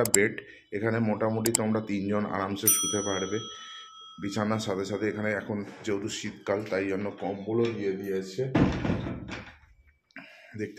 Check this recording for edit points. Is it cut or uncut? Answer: uncut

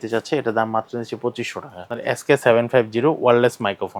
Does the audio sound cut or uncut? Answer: cut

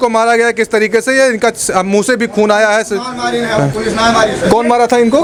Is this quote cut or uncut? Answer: uncut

